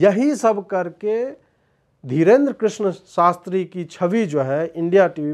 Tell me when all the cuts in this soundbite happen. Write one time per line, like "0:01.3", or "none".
none

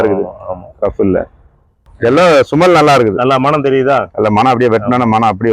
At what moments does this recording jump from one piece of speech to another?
0:01.9

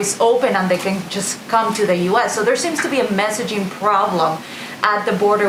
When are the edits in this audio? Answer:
none

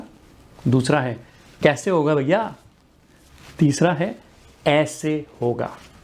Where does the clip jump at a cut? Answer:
none

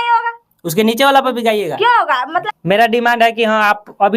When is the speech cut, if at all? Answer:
0:02.5

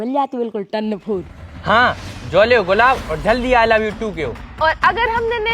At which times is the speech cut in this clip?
0:01.5
0:04.4

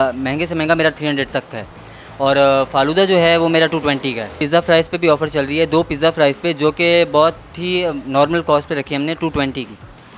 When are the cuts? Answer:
0:04.4

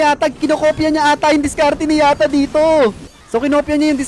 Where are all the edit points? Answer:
0:03.1

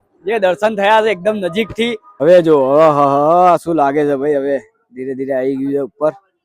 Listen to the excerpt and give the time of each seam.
0:02.0

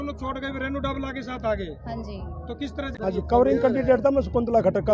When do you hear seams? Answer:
0:02.9

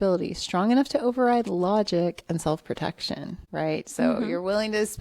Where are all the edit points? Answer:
0:03.4

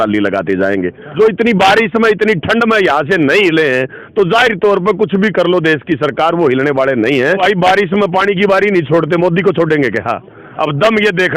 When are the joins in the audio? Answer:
0:01.0
0:07.4
0:10.4

